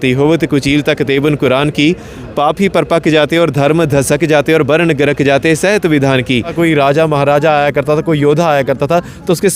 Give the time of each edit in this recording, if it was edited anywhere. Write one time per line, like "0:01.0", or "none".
0:06.5